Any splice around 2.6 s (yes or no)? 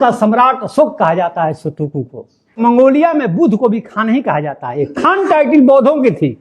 yes